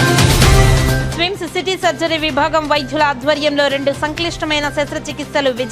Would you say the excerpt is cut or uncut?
cut